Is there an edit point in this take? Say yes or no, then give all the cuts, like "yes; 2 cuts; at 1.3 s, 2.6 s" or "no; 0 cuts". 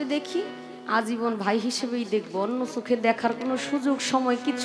no; 0 cuts